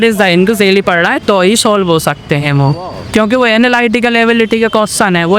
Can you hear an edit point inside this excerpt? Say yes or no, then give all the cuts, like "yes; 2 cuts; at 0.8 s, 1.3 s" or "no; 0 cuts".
no; 0 cuts